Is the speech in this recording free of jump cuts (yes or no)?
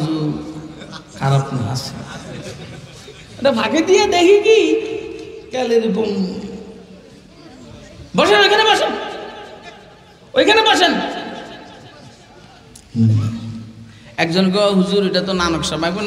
yes